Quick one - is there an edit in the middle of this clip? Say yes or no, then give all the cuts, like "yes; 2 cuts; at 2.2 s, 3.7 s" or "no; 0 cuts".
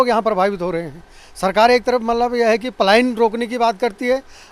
no; 0 cuts